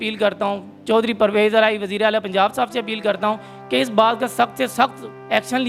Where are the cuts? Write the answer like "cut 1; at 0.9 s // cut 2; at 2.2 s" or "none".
none